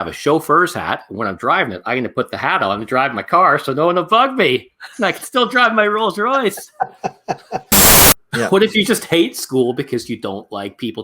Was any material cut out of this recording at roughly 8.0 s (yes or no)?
yes